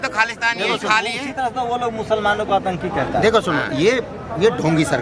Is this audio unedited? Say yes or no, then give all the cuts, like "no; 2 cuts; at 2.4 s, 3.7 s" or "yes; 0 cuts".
yes; 0 cuts